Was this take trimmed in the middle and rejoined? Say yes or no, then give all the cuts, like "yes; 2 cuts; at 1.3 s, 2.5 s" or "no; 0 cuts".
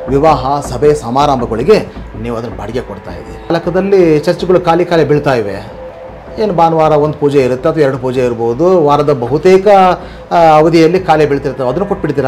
yes; 1 cut; at 3.5 s